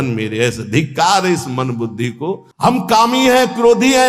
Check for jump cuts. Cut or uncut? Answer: cut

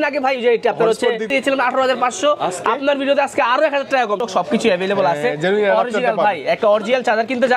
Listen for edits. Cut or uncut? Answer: cut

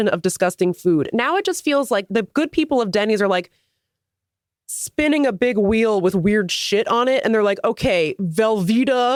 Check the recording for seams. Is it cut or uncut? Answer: uncut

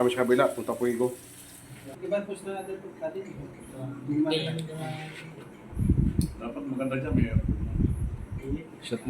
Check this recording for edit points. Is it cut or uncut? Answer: cut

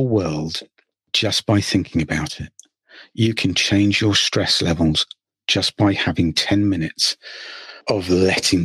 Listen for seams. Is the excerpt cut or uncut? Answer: uncut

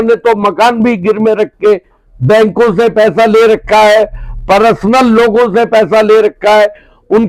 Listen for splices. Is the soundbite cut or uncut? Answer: uncut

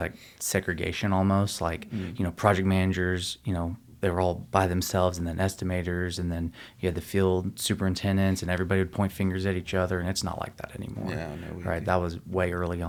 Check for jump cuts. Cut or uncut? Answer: uncut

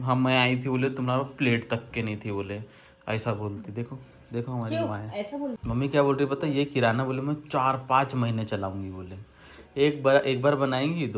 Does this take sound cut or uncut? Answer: uncut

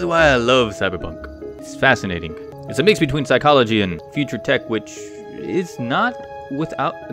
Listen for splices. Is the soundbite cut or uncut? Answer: cut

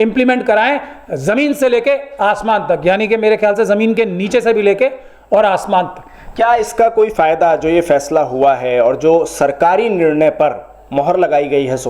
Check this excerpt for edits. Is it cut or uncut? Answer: uncut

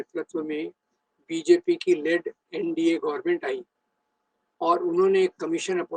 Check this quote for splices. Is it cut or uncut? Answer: uncut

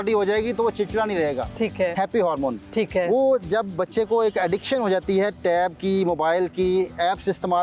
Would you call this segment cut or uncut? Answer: cut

